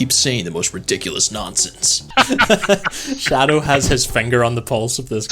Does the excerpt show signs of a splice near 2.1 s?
yes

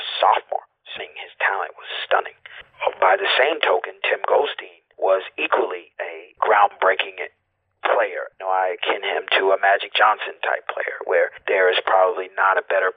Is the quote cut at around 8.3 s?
yes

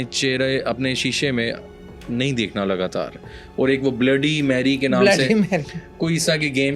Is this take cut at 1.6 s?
no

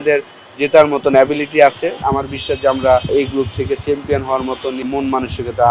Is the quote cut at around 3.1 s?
yes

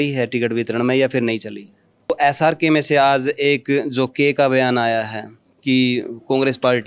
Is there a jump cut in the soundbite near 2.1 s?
yes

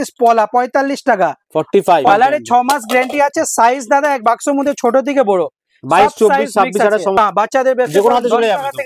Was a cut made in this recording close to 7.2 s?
yes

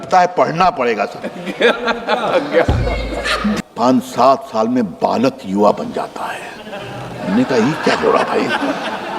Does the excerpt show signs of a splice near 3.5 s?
yes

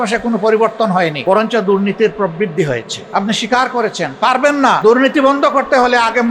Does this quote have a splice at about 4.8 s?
yes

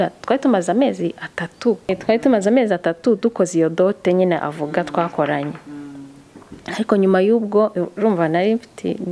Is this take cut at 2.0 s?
yes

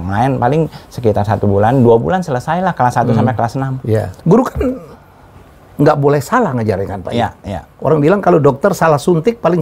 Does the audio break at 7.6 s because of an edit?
no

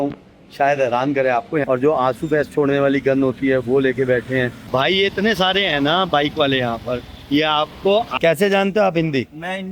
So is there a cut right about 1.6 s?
yes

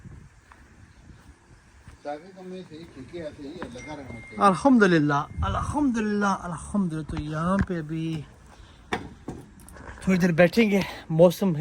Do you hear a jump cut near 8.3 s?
no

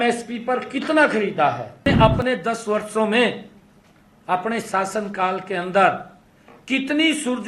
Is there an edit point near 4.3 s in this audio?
no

